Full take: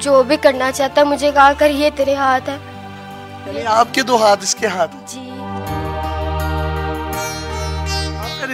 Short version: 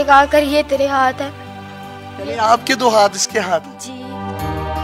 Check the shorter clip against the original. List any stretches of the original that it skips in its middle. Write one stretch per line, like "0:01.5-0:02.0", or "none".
none